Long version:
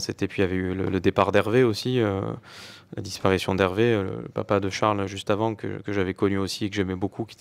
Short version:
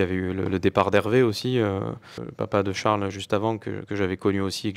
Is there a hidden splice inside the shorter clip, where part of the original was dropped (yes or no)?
yes